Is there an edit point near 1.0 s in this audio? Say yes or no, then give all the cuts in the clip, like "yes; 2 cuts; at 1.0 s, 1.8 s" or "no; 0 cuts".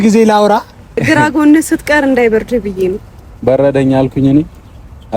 yes; 1 cut; at 1.0 s